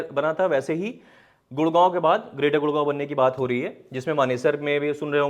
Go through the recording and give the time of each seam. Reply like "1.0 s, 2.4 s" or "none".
none